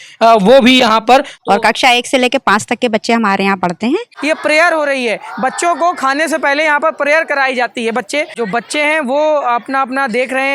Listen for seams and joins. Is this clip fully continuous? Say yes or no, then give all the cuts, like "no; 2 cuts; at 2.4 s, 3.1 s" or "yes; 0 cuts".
no; 3 cuts; at 1.3 s, 4.1 s, 8.3 s